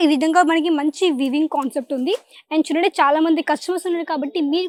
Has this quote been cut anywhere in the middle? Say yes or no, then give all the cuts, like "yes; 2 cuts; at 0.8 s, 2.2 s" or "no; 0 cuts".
no; 0 cuts